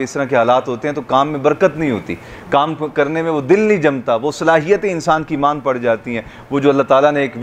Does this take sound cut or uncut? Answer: uncut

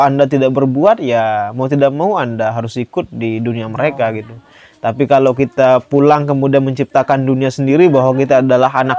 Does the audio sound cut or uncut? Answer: uncut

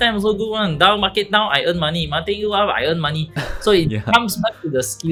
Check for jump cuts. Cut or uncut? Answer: uncut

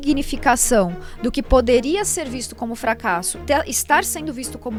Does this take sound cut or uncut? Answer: uncut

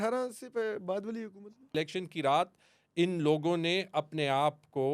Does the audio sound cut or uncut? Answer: cut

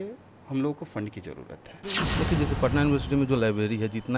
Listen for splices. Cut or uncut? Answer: cut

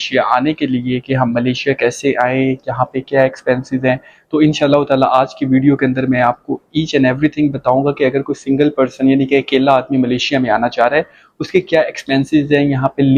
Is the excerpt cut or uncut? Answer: uncut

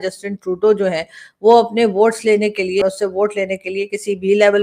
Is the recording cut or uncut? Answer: cut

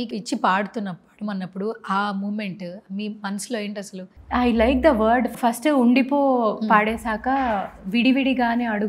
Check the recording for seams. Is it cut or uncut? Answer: cut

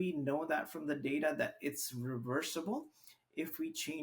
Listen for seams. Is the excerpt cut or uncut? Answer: uncut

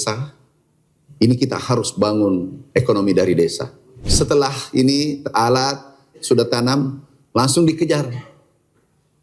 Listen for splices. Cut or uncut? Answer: cut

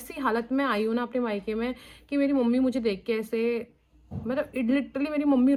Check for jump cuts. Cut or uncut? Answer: uncut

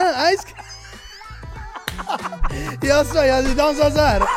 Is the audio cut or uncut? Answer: uncut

